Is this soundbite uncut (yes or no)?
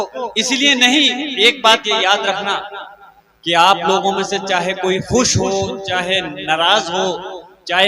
yes